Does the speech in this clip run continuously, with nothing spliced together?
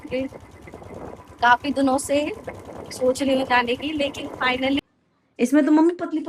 no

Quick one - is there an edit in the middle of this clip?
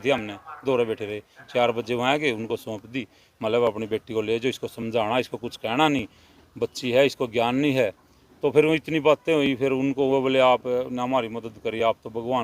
no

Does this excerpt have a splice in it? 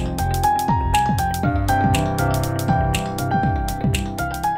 no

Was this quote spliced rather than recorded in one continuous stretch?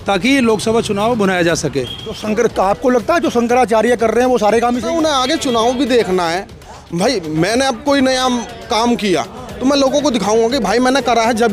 yes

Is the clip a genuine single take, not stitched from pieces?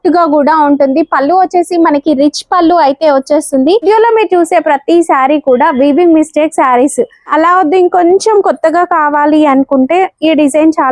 no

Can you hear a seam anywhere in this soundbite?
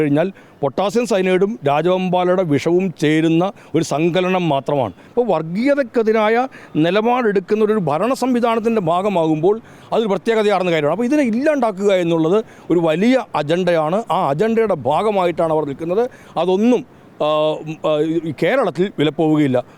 yes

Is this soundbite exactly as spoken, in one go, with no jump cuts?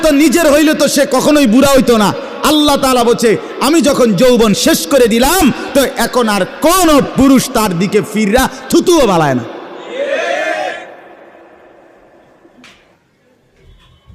yes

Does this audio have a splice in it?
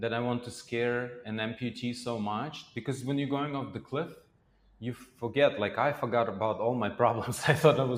no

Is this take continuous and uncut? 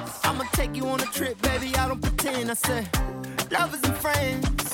yes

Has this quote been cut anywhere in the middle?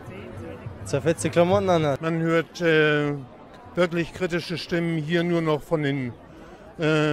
yes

